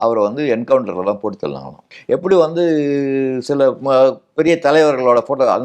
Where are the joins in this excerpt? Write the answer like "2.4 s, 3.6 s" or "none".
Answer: 1.9 s

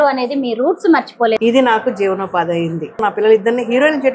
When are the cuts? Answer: 1.4 s, 3.0 s

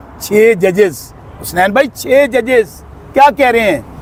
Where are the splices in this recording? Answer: none

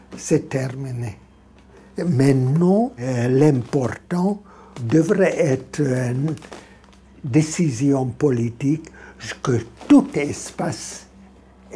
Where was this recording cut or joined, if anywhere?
1.8 s, 3.1 s, 4.8 s

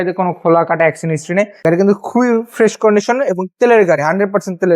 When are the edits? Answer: 1.5 s

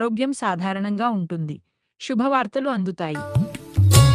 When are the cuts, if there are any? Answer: 3.2 s

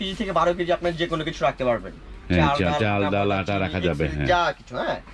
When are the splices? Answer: none

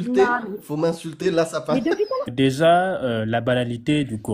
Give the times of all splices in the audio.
2.3 s

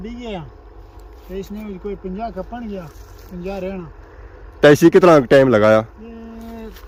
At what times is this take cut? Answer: none

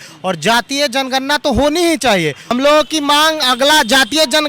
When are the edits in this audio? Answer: 2.5 s

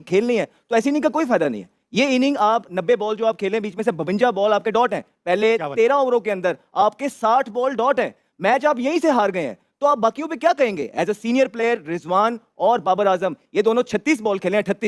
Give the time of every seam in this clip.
none

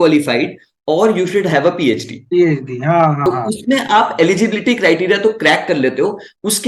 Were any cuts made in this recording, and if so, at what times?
3.2 s

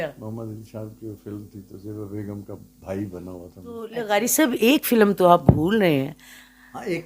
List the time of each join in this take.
3.9 s

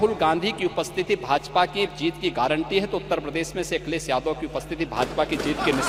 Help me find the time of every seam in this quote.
none

